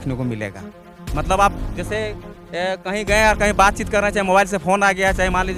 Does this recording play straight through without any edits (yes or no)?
yes